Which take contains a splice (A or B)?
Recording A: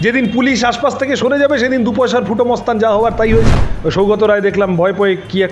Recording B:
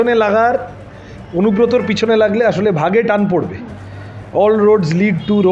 A